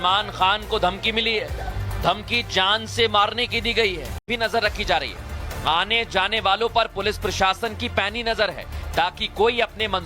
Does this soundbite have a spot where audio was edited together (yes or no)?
yes